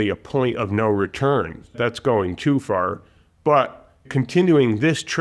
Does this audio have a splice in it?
yes; 2 cuts; at 1.7 s, 4.1 s

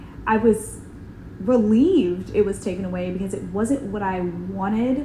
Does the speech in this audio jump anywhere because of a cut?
no; 0 cuts

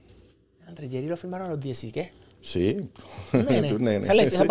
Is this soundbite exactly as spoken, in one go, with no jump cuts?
yes; 0 cuts

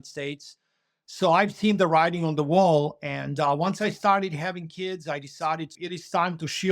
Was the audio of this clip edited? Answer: yes; 1 cut; at 5.8 s

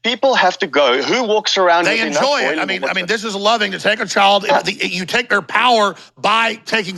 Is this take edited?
no; 0 cuts

